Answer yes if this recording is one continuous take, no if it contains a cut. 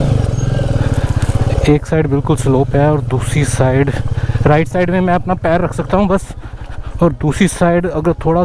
yes